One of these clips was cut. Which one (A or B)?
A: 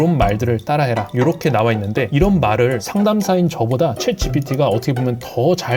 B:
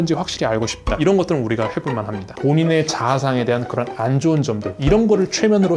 B